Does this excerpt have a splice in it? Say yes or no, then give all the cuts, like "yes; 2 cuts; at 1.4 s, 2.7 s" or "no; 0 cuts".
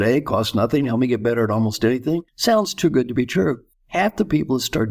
yes; 2 cuts; at 2.3 s, 3.7 s